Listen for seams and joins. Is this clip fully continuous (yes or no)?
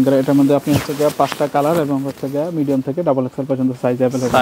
yes